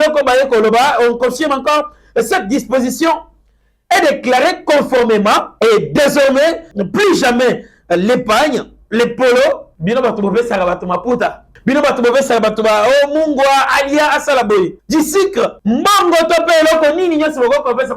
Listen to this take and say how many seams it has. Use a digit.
6